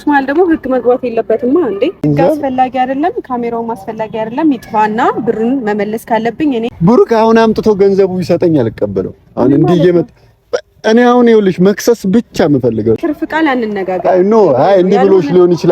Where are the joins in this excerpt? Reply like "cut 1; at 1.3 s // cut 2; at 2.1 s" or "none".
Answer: cut 1; at 2.1 s // cut 2; at 6.7 s // cut 3; at 13.0 s